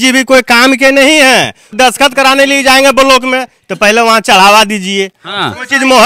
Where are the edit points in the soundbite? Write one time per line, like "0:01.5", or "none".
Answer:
none